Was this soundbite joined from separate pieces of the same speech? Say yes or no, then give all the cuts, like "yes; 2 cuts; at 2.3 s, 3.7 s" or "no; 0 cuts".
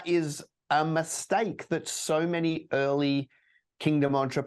no; 0 cuts